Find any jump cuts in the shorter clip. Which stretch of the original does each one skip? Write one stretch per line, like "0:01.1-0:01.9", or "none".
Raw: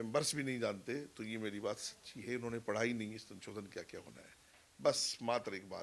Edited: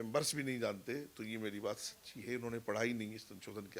none